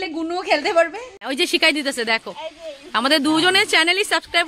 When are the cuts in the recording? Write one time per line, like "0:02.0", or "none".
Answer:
0:01.1